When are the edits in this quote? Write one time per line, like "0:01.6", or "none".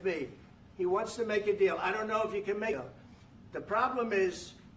0:02.8